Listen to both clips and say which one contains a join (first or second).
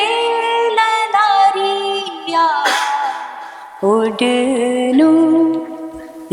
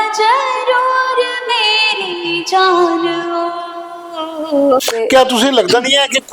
second